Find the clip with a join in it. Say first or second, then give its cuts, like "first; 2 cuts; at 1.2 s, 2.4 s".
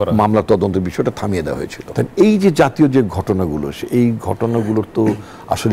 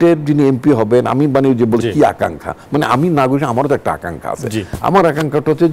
first; 1 cut; at 1.8 s